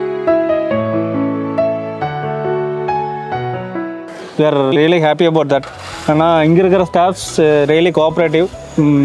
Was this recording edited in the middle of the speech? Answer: yes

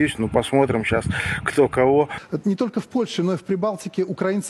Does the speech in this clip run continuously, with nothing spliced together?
no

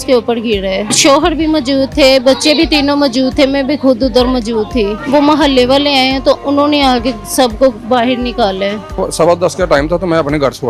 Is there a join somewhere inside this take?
yes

